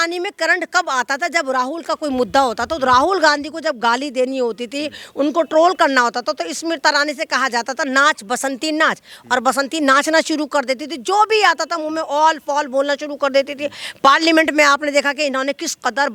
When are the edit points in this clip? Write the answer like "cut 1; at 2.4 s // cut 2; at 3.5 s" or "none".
none